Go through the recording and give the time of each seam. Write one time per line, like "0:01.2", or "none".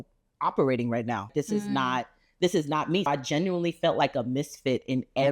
0:01.3
0:03.1